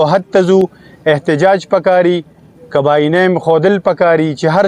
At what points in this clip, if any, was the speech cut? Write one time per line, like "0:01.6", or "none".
none